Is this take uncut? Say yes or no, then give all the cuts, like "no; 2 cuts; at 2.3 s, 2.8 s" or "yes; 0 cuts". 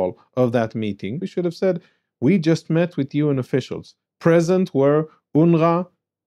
no; 1 cut; at 1.2 s